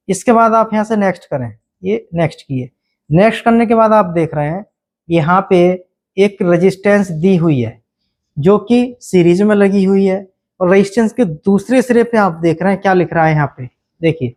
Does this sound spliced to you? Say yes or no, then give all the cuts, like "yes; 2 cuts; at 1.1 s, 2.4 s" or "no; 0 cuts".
no; 0 cuts